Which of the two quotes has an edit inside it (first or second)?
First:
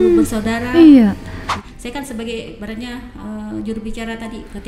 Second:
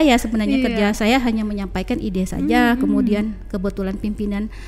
first